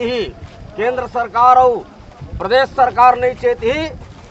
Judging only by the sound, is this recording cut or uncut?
uncut